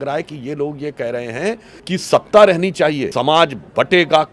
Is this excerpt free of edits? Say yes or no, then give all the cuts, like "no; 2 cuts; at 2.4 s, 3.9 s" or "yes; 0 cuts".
no; 2 cuts; at 1.7 s, 3.1 s